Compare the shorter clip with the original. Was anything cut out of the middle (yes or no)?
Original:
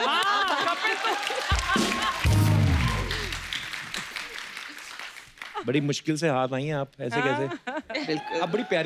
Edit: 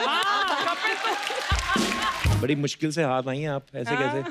yes